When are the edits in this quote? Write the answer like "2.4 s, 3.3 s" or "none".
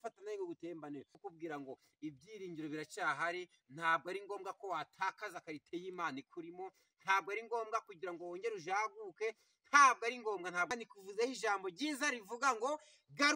1.2 s, 10.7 s